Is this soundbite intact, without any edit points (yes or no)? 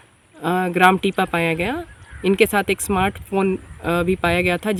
yes